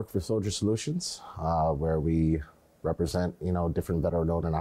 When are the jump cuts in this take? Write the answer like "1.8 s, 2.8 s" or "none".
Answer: none